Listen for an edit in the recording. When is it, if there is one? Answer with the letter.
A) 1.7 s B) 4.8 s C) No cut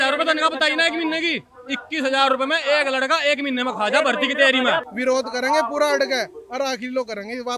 B